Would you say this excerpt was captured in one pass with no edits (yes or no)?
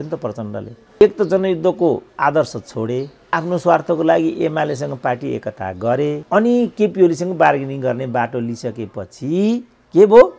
no